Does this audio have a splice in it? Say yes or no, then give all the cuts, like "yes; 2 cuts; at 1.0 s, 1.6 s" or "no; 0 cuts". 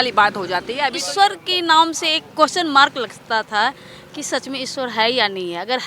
yes; 1 cut; at 0.9 s